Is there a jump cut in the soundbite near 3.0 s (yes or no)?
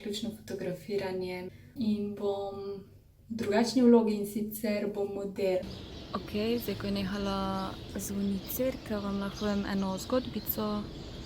no